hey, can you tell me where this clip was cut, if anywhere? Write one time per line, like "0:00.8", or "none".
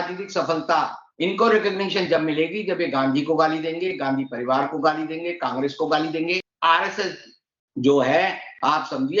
0:06.5

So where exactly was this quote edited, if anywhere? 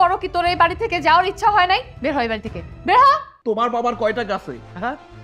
0:03.3

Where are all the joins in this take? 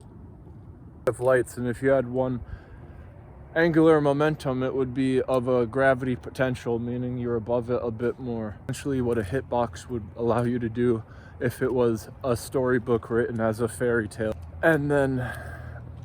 0:01.1
0:08.8
0:14.3

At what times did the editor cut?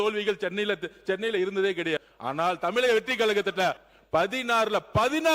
0:02.1
0:03.9

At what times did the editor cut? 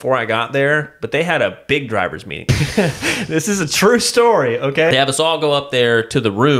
0:02.4
0:04.9

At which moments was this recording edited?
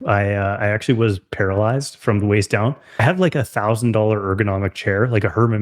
0:02.9

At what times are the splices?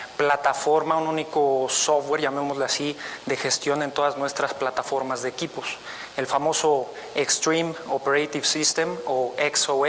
0:08.2

